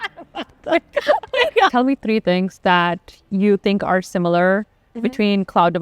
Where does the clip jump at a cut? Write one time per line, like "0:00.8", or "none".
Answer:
0:01.7